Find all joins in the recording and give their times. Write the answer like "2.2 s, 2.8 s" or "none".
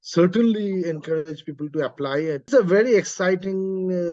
2.5 s